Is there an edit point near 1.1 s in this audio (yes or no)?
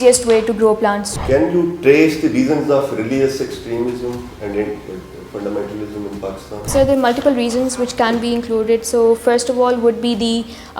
yes